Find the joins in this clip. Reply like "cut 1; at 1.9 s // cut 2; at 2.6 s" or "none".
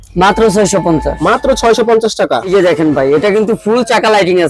cut 1; at 2.4 s